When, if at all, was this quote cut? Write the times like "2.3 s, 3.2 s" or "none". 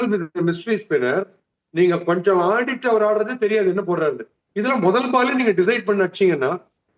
none